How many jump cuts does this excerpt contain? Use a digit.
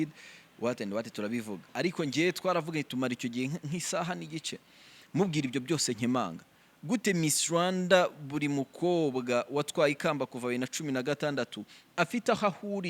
1